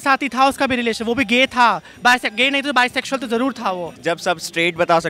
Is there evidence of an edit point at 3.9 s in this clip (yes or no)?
yes